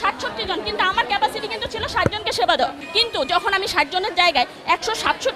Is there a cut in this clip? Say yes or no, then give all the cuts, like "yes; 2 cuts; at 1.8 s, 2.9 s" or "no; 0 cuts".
yes; 1 cut; at 2.8 s